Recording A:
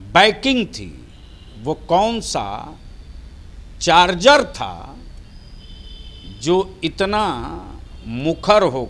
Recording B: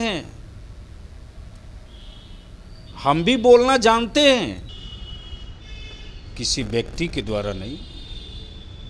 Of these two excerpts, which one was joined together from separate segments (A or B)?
B